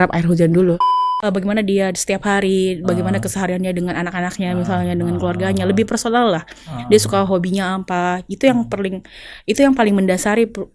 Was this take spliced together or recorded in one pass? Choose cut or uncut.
cut